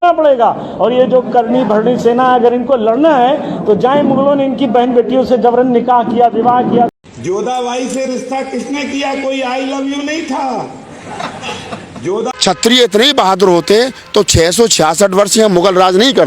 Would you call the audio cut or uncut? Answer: cut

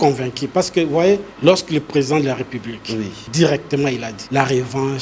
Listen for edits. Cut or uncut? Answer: cut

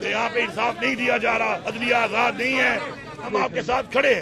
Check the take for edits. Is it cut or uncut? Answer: cut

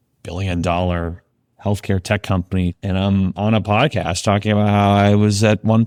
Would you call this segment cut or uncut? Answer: uncut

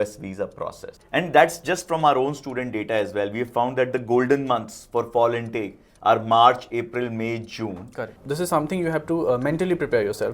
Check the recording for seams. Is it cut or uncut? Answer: cut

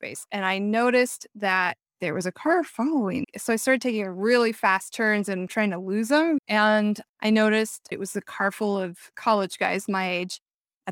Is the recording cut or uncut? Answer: cut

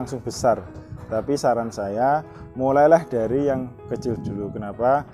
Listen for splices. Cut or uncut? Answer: uncut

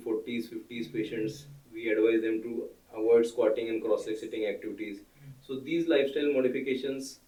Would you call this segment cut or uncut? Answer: uncut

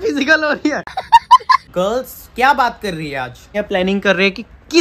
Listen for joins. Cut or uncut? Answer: cut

